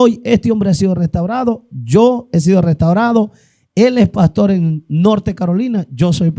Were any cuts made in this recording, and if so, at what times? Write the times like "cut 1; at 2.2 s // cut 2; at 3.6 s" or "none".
none

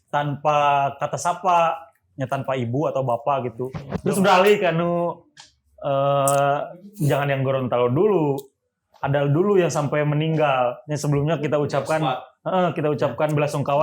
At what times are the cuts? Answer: cut 1; at 3.8 s

